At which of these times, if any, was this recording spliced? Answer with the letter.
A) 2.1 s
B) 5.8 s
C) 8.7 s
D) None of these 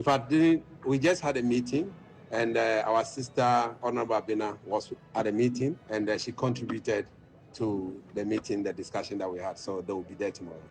B